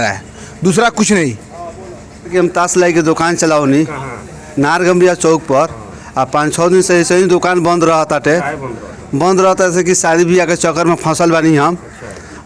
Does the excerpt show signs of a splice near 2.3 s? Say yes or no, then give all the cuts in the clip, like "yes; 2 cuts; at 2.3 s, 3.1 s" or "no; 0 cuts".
yes; 1 cut; at 2.3 s